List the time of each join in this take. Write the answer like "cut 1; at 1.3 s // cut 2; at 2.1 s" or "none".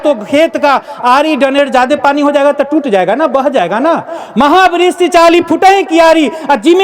none